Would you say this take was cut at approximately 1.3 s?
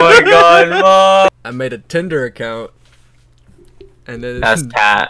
yes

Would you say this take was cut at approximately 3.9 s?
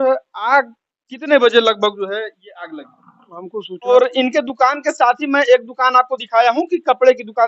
yes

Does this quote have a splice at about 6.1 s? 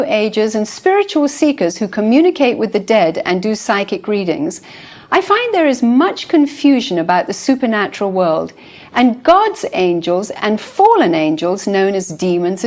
no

